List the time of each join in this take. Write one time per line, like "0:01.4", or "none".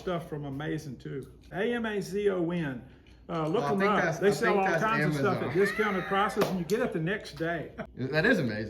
0:01.5
0:07.8